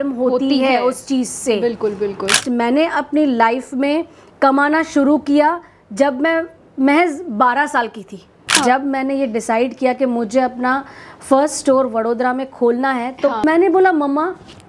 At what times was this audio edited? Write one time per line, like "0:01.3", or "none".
0:02.3
0:08.6
0:13.4